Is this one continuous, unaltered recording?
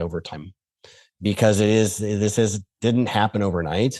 yes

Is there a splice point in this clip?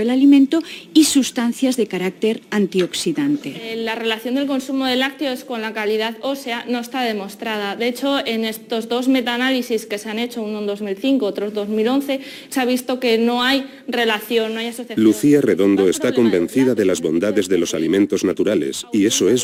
no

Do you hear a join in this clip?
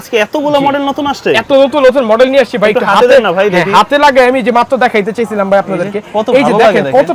no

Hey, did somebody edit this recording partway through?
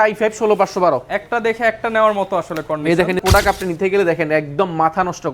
yes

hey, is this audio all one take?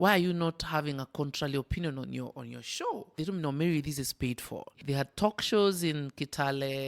no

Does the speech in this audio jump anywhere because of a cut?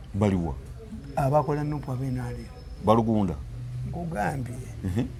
no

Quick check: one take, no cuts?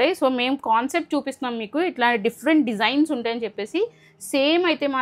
yes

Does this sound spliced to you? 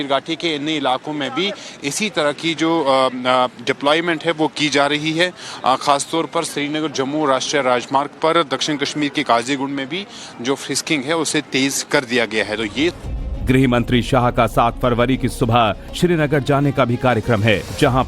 yes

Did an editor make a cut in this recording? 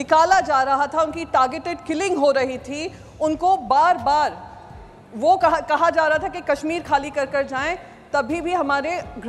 no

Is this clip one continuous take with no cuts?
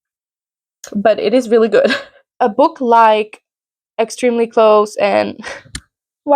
no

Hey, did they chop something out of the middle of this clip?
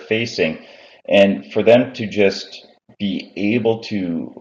no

